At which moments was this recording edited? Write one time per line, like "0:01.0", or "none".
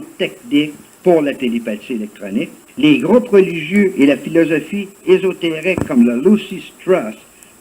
0:02.6